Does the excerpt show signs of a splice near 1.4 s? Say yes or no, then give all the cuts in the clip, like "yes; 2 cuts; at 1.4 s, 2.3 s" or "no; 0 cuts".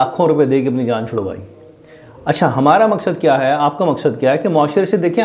no; 0 cuts